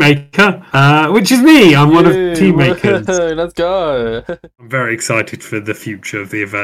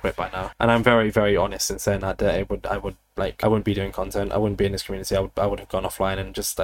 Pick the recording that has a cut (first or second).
first